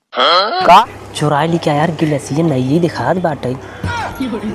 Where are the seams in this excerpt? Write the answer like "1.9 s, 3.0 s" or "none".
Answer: 1.0 s

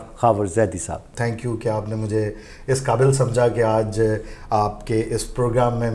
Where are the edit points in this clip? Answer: 1.1 s

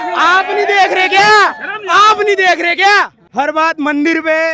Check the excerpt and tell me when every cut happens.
3.2 s

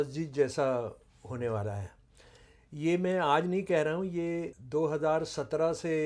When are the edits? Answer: 4.6 s

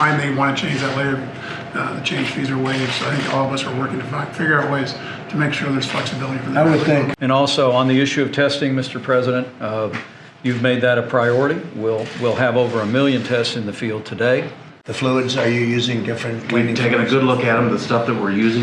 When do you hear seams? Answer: 7.1 s, 14.8 s

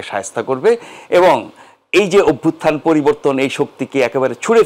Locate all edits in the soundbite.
none

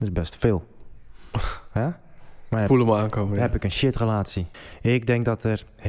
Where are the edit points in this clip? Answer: 4.4 s

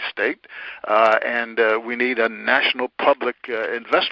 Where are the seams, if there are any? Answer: none

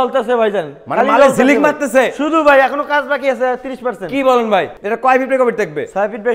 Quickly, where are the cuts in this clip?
4.8 s

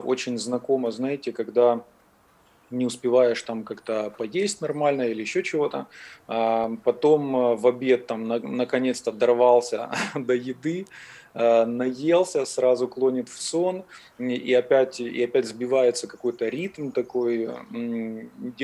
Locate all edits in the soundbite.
none

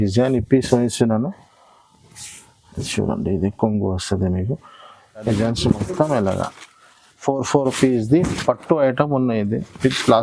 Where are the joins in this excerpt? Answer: 5.3 s

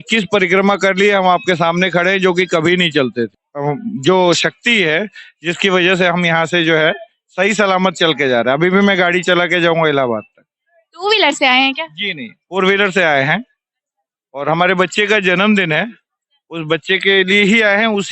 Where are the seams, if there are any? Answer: none

